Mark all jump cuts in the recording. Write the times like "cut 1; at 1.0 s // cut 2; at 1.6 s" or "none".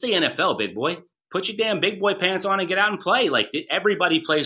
cut 1; at 1.1 s